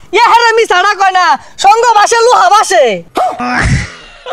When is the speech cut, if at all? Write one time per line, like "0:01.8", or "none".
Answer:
0:03.4